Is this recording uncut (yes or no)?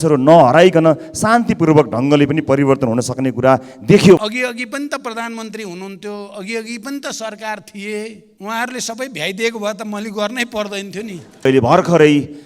no